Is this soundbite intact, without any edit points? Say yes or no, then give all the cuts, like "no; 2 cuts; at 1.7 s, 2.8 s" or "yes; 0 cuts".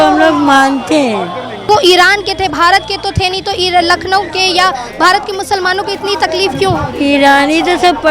no; 1 cut; at 1.7 s